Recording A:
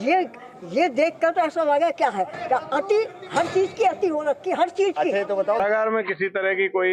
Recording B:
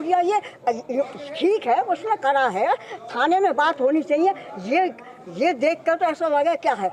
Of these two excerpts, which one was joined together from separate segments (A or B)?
A